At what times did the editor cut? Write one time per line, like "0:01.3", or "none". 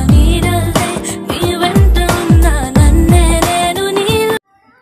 none